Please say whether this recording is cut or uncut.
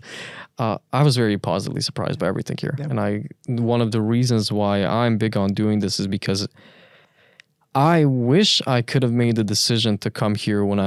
uncut